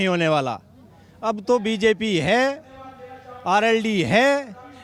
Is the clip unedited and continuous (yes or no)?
yes